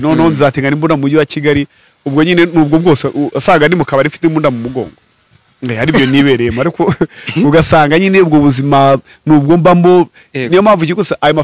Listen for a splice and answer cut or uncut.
uncut